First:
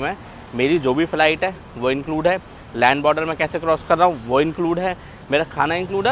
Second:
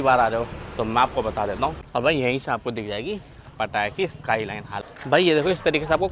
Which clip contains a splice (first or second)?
second